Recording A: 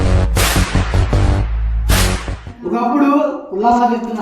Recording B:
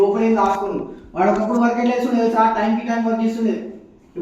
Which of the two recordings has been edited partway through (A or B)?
A